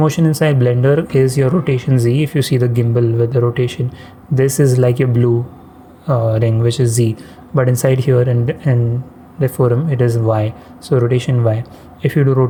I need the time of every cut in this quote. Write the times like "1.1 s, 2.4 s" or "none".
none